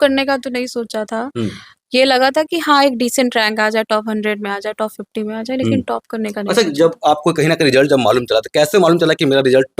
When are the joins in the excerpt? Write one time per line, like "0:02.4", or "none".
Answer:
none